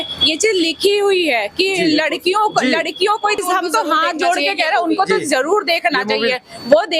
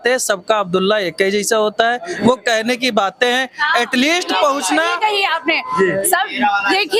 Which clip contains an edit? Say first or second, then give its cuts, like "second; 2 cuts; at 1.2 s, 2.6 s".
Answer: first; 1 cut; at 3.4 s